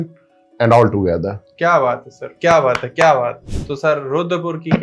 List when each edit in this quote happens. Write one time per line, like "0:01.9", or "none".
0:03.4